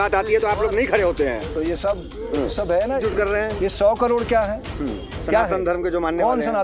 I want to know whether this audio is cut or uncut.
cut